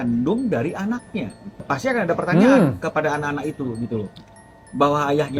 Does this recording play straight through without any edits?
yes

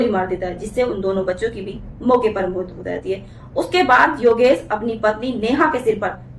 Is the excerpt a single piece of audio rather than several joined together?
yes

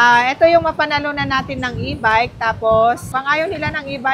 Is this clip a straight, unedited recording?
yes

